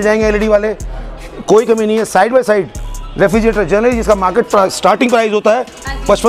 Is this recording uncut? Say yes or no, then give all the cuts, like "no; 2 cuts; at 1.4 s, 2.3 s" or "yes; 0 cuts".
yes; 0 cuts